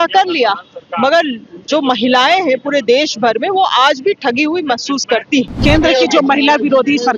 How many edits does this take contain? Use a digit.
1